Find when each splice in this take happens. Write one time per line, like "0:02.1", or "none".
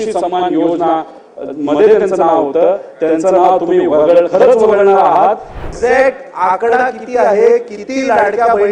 0:05.7